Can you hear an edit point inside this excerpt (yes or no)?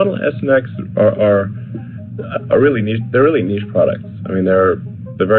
no